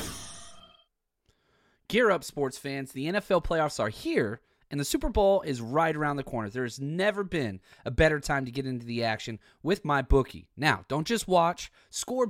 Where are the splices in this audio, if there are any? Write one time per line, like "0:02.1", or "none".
0:00.9